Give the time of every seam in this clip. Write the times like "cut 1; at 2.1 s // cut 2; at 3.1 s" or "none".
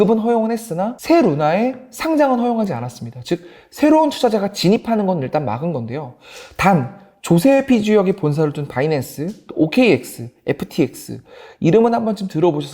cut 1; at 0.9 s